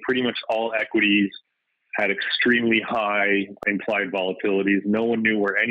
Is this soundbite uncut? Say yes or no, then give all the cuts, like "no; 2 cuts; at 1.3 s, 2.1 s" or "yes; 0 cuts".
no; 1 cut; at 3.6 s